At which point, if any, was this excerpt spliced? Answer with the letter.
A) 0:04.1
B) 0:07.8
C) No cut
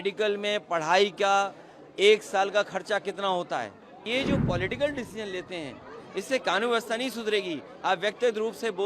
A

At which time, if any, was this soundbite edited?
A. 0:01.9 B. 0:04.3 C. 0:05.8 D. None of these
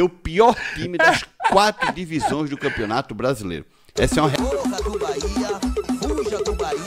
B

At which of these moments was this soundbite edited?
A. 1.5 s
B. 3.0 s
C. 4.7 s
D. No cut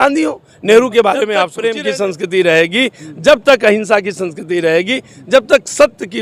A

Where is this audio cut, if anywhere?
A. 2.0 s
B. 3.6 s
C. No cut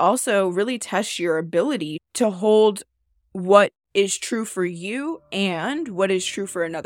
A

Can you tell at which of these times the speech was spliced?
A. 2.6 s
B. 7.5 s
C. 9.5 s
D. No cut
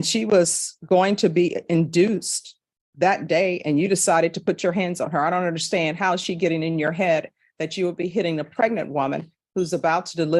D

